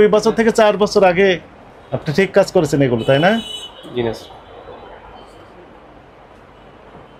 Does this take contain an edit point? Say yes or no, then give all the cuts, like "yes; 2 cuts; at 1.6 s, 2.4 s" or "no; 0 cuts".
no; 0 cuts